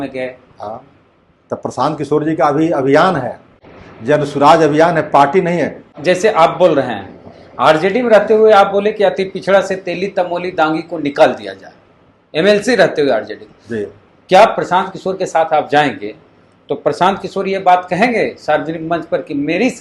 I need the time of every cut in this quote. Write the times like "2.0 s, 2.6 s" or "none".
5.9 s